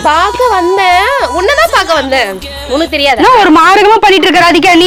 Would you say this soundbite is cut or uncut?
uncut